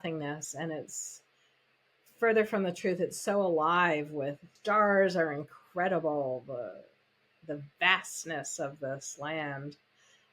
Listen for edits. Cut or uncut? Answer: cut